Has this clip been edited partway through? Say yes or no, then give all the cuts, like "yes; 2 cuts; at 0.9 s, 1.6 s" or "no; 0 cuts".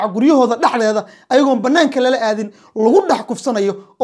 no; 0 cuts